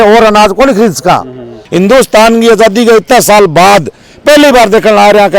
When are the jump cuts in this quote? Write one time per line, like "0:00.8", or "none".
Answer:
0:01.6